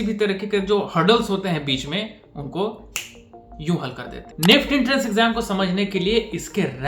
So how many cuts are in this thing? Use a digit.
1